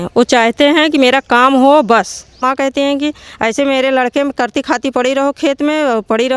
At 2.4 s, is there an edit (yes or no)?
yes